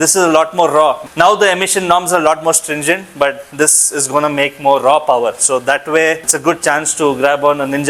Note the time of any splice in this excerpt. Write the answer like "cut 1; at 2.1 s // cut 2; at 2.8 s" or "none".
none

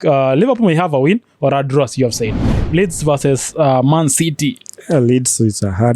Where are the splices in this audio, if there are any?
cut 1; at 2.4 s

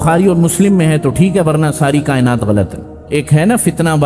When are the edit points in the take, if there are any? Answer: cut 1; at 3.0 s

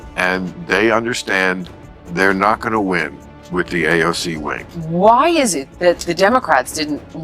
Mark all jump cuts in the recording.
cut 1; at 4.6 s

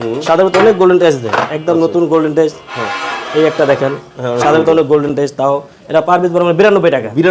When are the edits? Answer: none

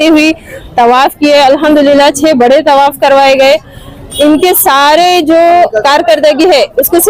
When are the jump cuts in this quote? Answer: none

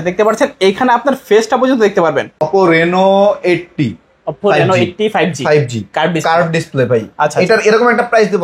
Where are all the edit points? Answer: cut 1; at 2.5 s

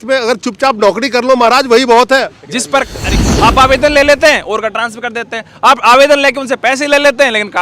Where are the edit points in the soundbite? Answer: cut 1; at 3.1 s

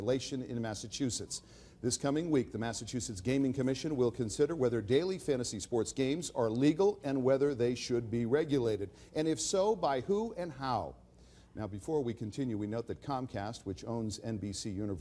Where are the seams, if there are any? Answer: cut 1; at 3.9 s

